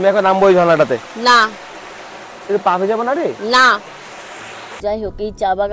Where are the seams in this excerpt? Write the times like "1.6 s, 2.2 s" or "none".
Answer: 4.8 s